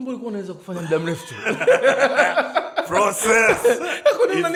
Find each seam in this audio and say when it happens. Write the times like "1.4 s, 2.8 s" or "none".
none